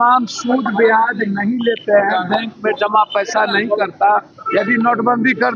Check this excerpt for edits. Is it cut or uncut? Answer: cut